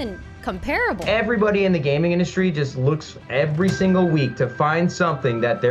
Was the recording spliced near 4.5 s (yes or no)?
no